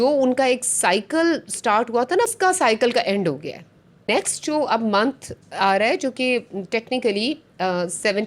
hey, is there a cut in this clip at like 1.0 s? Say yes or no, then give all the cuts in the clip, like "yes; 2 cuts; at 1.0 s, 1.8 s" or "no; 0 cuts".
no; 2 cuts; at 2.3 s, 4.1 s